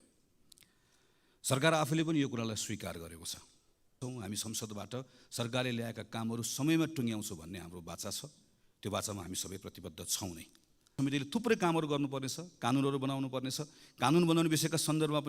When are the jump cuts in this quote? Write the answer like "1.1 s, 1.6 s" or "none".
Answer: 4.0 s, 10.9 s